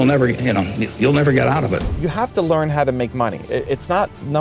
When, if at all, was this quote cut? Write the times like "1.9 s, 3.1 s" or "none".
1.9 s